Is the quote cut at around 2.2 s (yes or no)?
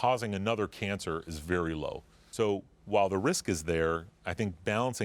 yes